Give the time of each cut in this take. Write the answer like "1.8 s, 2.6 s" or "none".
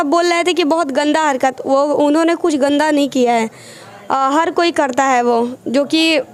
none